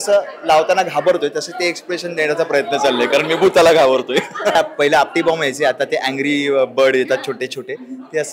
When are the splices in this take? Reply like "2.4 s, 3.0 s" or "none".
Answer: 4.6 s

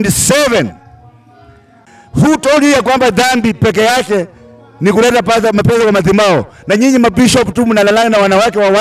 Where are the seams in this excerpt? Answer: 1.8 s

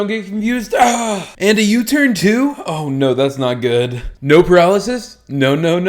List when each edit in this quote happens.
4.1 s

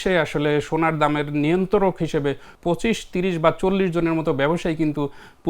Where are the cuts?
2.5 s

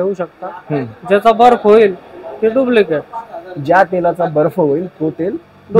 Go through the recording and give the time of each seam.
none

